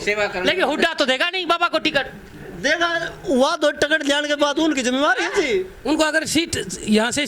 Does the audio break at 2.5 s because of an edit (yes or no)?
no